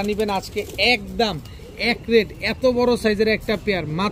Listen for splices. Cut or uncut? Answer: uncut